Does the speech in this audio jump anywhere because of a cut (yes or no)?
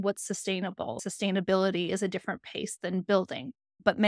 yes